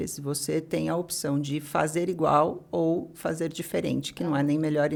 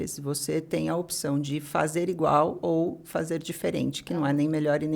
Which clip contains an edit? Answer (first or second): second